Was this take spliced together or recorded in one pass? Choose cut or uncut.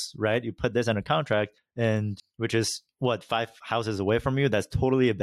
cut